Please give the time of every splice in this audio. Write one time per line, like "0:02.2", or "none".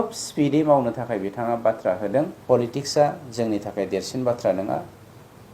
0:02.4